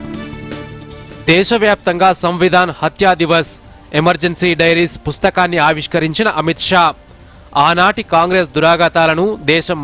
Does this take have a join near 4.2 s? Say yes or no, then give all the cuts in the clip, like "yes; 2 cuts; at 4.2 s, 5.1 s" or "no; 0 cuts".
no; 1 cut; at 1.0 s